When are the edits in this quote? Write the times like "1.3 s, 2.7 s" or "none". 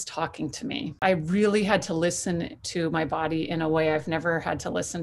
1.0 s